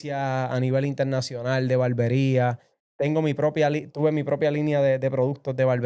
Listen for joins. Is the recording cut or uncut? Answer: uncut